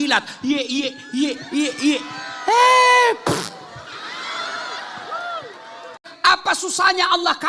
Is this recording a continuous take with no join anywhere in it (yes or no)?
no